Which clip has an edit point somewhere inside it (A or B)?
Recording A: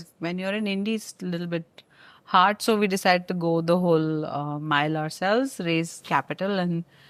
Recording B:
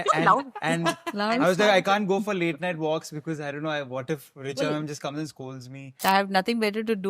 B